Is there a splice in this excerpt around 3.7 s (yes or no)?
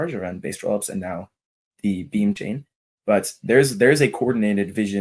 no